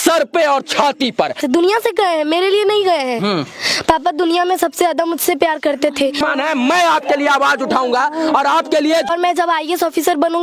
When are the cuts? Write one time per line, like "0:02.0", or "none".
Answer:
0:01.4
0:06.2
0:09.1